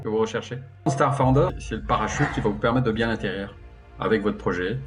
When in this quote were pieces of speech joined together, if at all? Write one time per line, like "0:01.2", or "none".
0:00.9
0:01.6